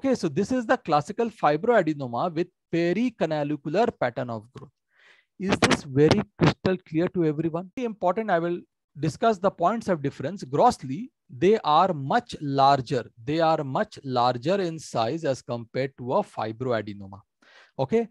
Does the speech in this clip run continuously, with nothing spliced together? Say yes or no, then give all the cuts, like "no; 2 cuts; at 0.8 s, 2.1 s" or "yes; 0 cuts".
no; 1 cut; at 7.9 s